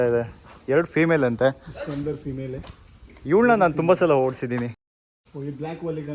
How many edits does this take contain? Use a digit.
1